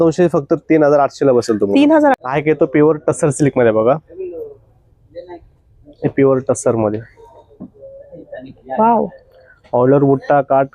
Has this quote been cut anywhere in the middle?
yes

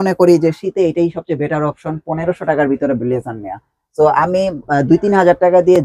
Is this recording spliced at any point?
no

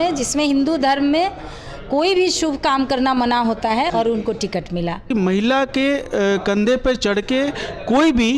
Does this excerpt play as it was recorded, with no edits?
no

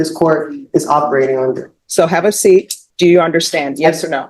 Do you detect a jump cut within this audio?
yes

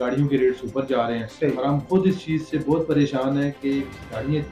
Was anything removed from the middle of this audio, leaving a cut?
no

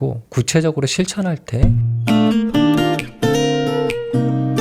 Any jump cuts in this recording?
yes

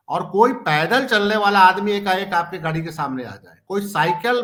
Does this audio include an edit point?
no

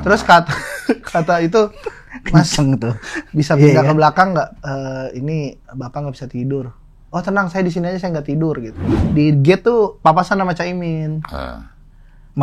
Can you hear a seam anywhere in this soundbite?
yes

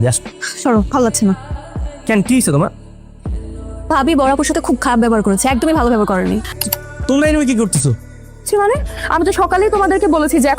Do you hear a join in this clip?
yes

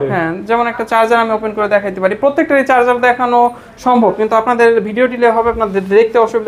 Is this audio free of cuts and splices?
yes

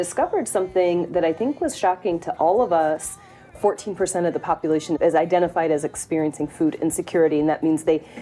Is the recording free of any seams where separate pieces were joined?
yes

